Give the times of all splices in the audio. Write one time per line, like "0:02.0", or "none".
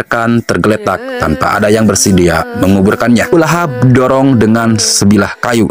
0:03.3